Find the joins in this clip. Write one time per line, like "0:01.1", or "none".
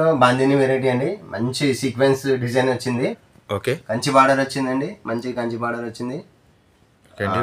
0:03.2